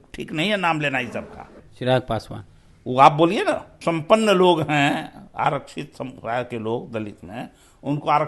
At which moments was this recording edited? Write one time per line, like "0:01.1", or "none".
0:01.6
0:03.7